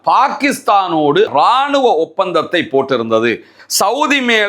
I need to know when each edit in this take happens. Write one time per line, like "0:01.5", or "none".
0:01.3
0:03.6